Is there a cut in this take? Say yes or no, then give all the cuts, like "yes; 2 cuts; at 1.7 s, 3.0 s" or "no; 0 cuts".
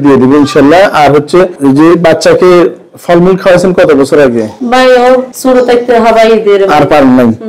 yes; 3 cuts; at 1.5 s, 4.6 s, 5.3 s